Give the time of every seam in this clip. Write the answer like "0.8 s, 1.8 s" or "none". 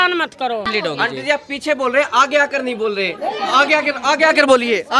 1.1 s